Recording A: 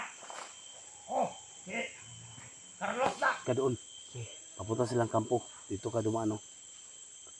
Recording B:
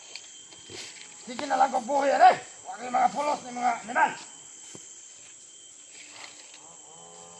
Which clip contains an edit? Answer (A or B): A